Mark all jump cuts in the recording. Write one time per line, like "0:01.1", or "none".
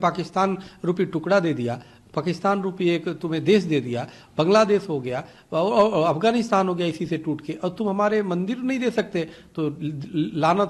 none